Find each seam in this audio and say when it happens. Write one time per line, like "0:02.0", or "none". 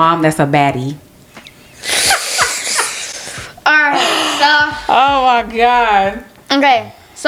none